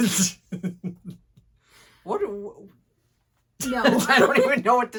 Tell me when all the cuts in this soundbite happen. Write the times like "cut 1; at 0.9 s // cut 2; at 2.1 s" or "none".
none

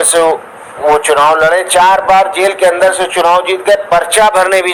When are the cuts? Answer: none

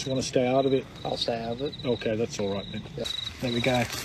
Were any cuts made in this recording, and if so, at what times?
cut 1; at 3.1 s

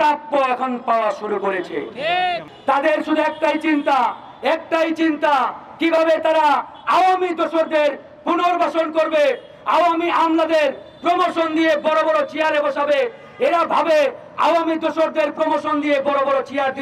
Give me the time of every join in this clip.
cut 1; at 2.5 s

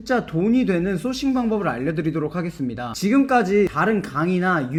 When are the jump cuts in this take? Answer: none

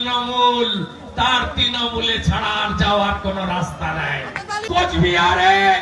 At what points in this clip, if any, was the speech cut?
cut 1; at 4.6 s

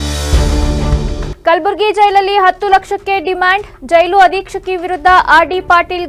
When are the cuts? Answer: none

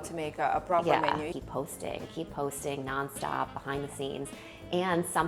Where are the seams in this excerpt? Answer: cut 1; at 1.3 s

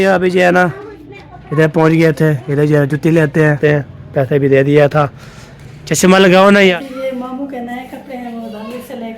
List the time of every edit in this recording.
cut 1; at 3.6 s // cut 2; at 6.7 s

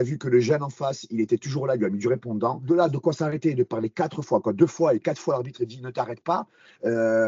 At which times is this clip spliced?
cut 1; at 2.6 s

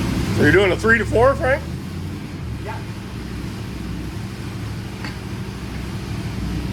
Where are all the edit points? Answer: none

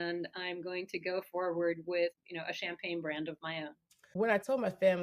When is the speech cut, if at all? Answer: cut 1; at 2.1 s // cut 2; at 4.0 s

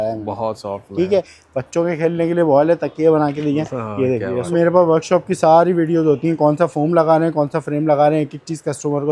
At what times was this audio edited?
cut 1; at 1.4 s // cut 2; at 4.5 s

